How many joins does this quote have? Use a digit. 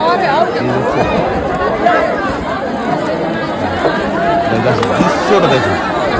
0